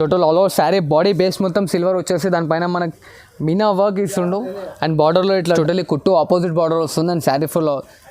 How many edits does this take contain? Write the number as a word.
one